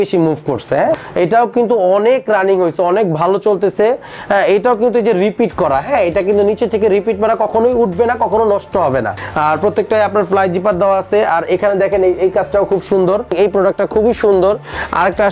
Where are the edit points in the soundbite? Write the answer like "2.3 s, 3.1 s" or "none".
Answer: 1.0 s, 9.2 s, 13.3 s